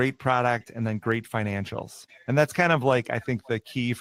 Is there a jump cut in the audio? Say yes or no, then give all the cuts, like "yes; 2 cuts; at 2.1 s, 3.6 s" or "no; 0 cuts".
no; 0 cuts